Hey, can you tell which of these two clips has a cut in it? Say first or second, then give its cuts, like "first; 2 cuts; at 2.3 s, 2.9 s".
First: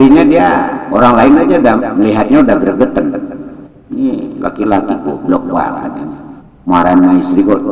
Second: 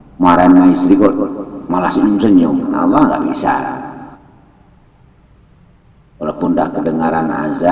second; 1 cut; at 2.7 s